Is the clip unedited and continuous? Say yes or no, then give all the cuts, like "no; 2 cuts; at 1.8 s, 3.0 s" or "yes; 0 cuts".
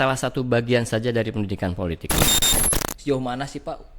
no; 1 cut; at 2.4 s